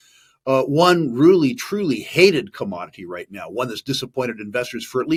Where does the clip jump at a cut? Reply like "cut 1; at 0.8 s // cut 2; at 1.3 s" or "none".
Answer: none